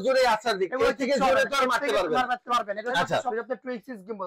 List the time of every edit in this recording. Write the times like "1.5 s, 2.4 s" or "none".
3.3 s